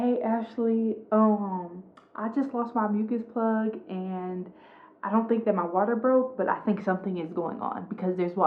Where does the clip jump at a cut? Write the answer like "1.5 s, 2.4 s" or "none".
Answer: none